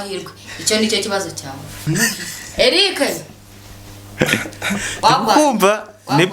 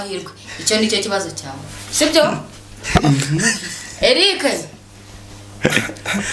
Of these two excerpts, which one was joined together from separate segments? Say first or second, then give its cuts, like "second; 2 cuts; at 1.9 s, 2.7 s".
first; 1 cut; at 1.8 s